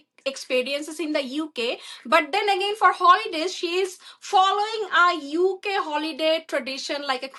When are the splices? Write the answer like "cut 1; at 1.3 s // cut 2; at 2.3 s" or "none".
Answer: none